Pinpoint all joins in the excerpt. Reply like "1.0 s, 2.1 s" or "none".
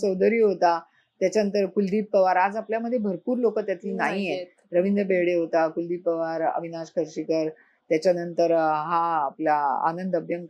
none